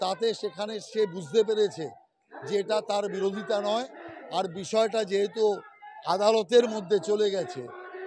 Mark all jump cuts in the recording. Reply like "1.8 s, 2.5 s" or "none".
none